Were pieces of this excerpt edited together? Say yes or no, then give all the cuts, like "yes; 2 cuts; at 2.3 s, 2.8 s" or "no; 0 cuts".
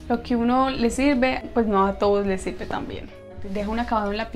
yes; 2 cuts; at 1.4 s, 3.3 s